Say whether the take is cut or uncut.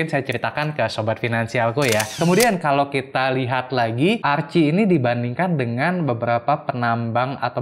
cut